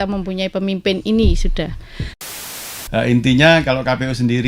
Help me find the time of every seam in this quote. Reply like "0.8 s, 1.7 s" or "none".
2.3 s